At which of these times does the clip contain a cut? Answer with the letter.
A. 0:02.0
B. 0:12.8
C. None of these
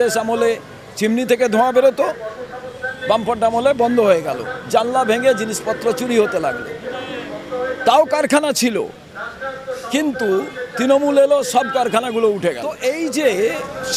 B